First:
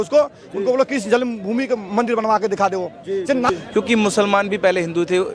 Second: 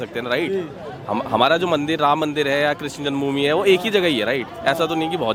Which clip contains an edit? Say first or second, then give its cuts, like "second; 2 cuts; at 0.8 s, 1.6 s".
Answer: first; 1 cut; at 3.5 s